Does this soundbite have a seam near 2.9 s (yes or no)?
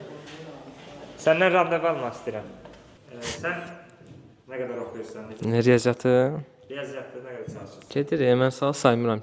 yes